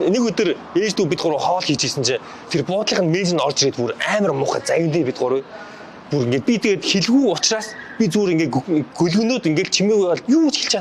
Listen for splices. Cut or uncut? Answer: uncut